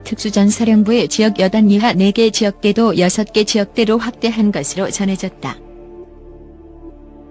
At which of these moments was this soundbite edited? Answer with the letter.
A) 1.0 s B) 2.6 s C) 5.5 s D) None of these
C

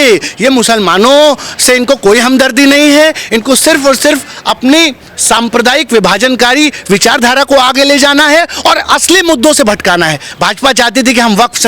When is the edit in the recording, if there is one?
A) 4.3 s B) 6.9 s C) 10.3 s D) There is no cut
C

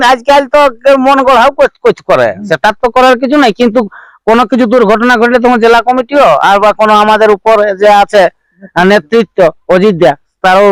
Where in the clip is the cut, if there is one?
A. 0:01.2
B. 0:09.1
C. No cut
C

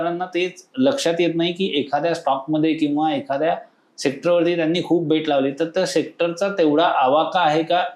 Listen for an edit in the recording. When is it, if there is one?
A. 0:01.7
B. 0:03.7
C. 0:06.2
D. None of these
D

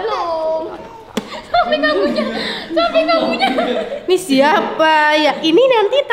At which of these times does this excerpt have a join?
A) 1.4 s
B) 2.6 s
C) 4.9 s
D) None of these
A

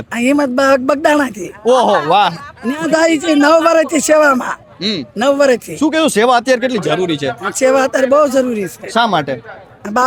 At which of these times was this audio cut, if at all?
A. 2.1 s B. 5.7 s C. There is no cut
C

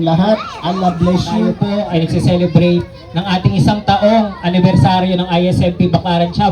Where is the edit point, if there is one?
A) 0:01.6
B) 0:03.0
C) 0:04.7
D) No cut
A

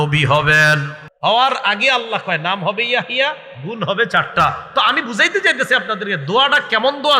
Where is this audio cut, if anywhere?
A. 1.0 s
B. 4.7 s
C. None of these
A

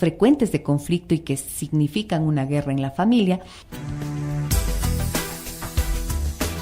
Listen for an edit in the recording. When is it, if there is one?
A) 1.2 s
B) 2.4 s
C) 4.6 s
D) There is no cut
B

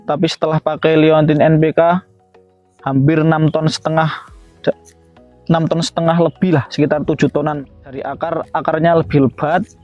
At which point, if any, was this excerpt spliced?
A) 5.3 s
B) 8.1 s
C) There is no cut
B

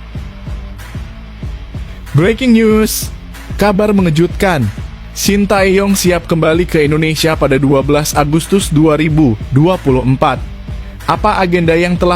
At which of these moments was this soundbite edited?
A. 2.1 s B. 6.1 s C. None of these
A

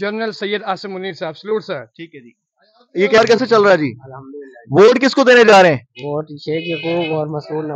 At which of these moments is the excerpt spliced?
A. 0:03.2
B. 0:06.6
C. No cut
A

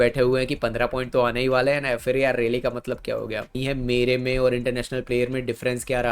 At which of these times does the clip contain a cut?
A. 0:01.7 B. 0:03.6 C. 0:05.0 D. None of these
B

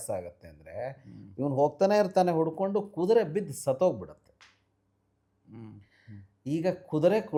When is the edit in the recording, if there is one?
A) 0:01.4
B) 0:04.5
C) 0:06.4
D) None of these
D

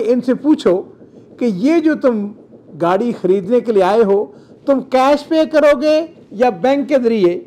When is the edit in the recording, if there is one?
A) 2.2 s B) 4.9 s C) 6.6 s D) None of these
D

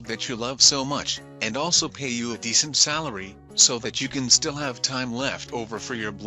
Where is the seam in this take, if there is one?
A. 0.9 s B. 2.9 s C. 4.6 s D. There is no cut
D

